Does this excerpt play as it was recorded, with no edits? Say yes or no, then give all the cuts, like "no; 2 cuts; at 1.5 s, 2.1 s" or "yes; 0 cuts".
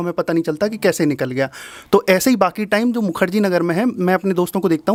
yes; 0 cuts